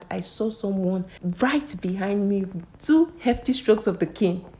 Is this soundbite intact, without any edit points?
no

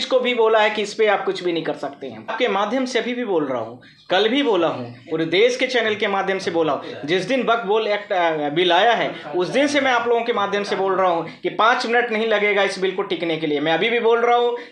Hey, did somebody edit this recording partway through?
yes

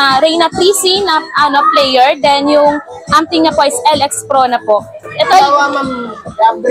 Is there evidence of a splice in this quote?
yes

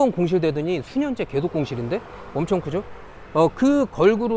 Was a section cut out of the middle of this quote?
no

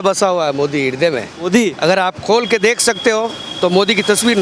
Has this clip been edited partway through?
no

